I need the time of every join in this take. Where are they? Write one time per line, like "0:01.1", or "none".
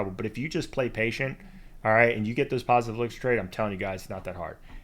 none